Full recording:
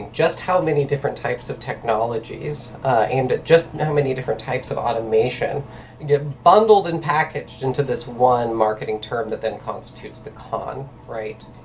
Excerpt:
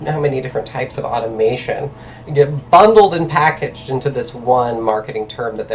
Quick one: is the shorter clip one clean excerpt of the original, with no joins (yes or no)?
yes